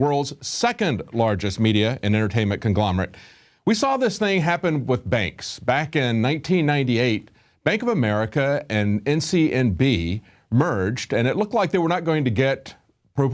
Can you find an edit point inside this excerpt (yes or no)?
yes